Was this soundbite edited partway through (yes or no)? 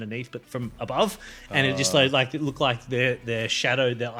no